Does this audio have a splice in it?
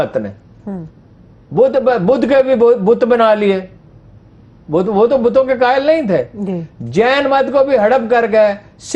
no; 0 cuts

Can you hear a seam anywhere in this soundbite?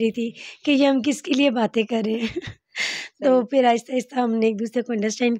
no; 0 cuts

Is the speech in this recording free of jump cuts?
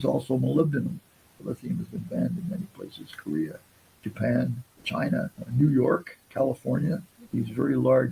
no; 1 cut; at 1.4 s

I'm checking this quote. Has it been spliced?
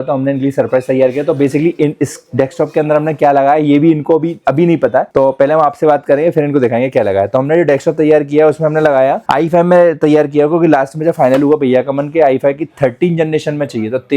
no; 0 cuts

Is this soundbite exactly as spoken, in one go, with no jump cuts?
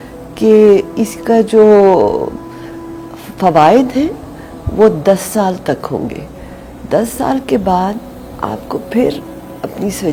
yes; 0 cuts

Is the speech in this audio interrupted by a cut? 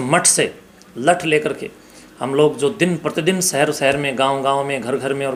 no; 0 cuts

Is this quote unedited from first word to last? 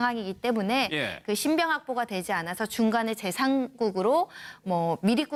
yes; 0 cuts

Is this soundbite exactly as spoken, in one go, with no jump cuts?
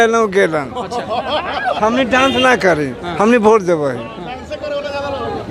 yes; 0 cuts

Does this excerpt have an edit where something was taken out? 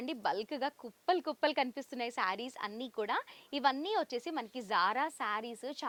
no; 0 cuts

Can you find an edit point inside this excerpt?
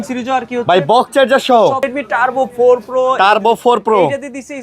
yes; 1 cut; at 1.9 s

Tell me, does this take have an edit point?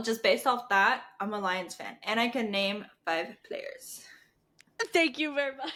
no; 0 cuts

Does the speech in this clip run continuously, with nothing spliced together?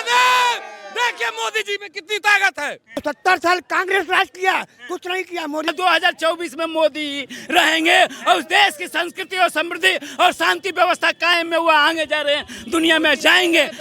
no; 2 cuts; at 3.0 s, 5.7 s

